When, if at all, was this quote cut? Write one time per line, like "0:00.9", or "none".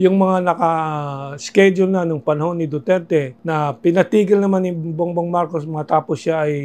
0:03.4